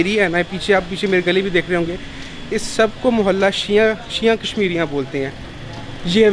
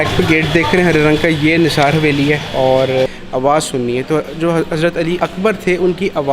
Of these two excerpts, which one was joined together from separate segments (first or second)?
second